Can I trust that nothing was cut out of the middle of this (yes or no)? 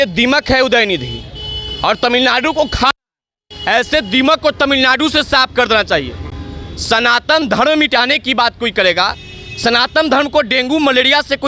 yes